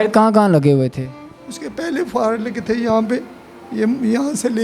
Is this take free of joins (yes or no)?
yes